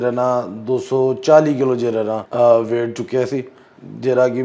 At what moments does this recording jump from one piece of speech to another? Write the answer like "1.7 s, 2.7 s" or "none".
2.2 s